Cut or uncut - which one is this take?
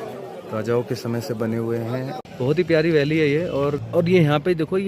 cut